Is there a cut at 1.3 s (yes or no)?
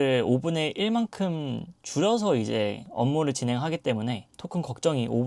no